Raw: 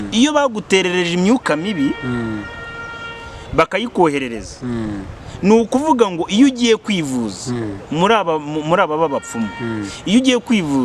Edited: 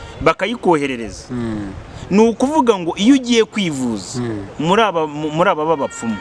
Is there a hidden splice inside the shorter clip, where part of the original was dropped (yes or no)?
no